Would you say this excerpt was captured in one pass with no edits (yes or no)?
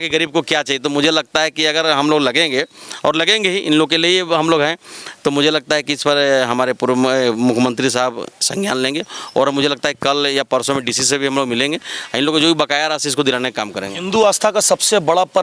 yes